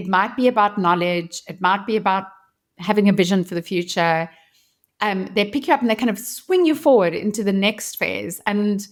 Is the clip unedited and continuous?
yes; 0 cuts

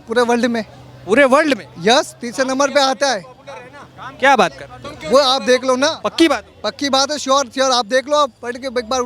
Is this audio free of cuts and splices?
yes; 0 cuts

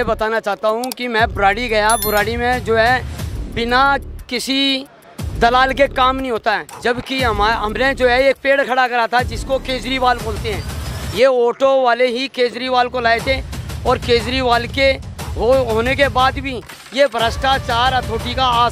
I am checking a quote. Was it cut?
no; 0 cuts

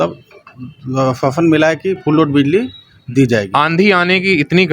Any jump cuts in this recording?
yes; 1 cut; at 3.5 s

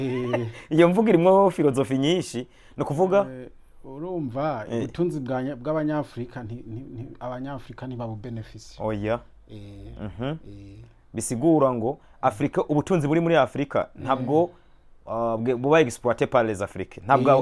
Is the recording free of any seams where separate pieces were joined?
yes; 0 cuts

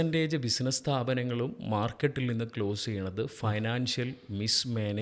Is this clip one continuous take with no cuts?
yes; 0 cuts

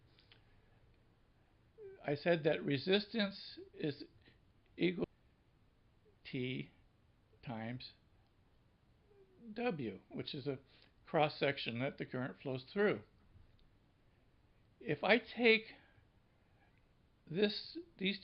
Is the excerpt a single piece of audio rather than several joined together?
yes; 0 cuts

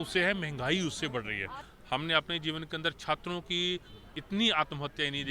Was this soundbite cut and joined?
yes; 1 cut; at 1.7 s

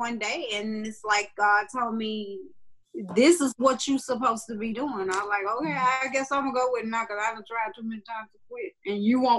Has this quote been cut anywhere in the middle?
no; 0 cuts

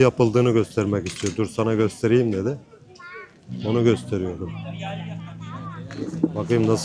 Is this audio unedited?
yes; 0 cuts

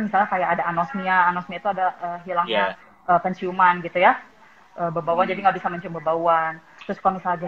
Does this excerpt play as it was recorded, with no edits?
yes; 0 cuts

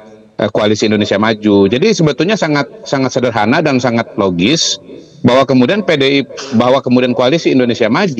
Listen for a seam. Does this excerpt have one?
no; 0 cuts

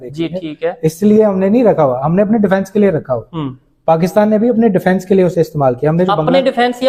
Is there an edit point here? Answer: no; 0 cuts

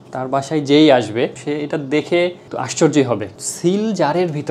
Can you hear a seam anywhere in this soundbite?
yes; 1 cut; at 3.4 s

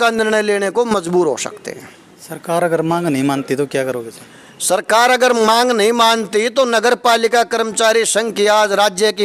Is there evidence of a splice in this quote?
no; 0 cuts

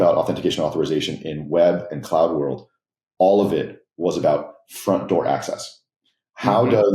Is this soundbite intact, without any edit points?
yes; 0 cuts

